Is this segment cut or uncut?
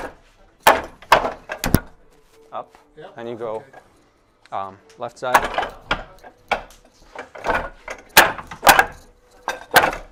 uncut